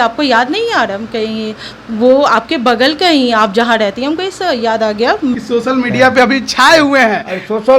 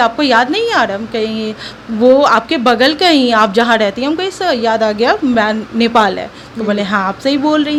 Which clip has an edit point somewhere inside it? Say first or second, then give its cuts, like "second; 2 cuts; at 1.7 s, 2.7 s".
first; 1 cut; at 5.3 s